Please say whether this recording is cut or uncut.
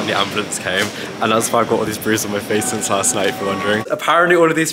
cut